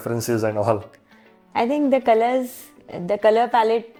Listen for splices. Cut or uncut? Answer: uncut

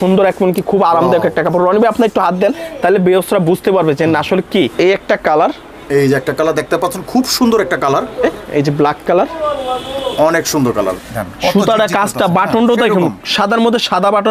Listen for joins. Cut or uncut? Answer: cut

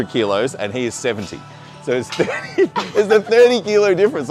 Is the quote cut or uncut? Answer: uncut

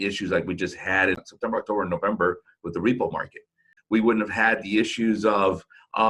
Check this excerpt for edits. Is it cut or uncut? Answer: cut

